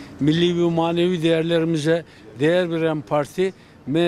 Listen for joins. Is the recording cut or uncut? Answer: uncut